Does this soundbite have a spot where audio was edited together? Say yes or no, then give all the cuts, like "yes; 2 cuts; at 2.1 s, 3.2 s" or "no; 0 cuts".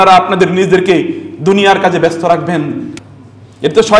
yes; 1 cut; at 3.0 s